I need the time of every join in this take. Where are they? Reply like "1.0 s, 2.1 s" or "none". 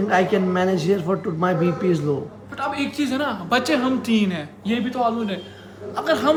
none